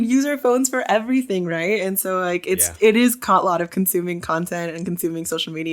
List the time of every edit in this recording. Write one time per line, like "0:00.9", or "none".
none